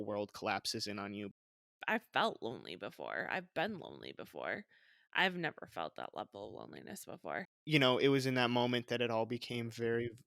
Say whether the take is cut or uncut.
cut